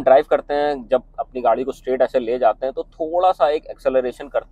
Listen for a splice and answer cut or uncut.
uncut